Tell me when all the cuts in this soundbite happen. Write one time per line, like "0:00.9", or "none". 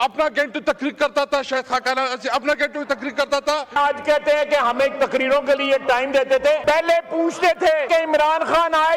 0:03.8
0:06.6
0:07.9